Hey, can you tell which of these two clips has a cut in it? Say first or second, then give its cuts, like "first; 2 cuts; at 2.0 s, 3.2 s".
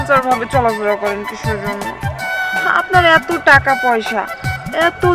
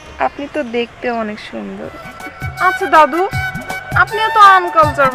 second; 1 cut; at 2.4 s